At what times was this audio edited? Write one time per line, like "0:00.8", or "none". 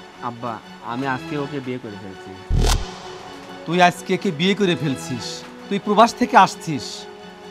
none